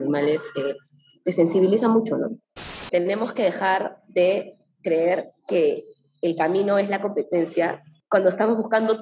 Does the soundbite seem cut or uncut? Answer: cut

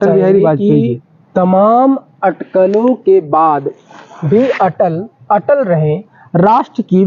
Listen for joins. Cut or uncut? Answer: uncut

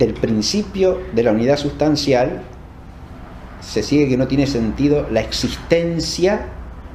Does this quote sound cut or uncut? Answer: uncut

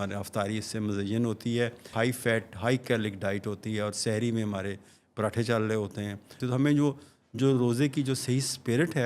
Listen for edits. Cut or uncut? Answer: cut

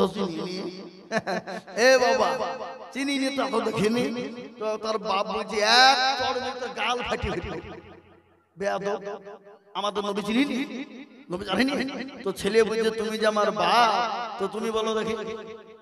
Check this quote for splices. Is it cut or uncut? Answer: uncut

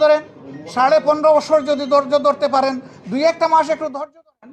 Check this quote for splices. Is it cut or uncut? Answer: uncut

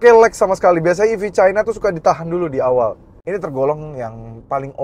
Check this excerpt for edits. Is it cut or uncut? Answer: cut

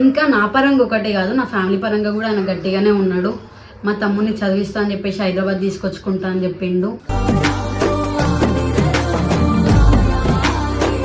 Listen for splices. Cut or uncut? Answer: uncut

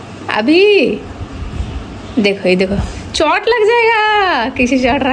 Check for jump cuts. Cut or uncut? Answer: uncut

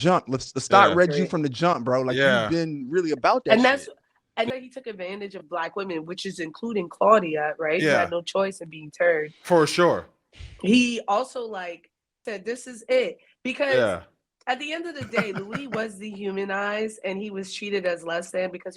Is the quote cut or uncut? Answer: cut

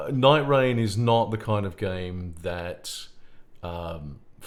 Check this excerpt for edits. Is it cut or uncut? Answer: uncut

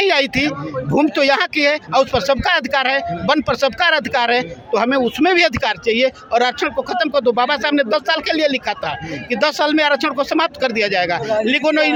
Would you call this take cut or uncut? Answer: uncut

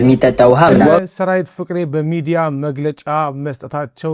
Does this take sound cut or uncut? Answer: cut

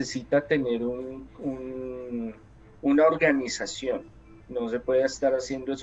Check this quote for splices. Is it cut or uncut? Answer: uncut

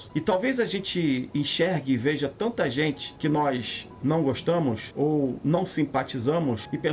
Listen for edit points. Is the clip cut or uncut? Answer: uncut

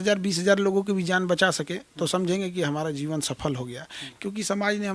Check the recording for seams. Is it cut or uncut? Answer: uncut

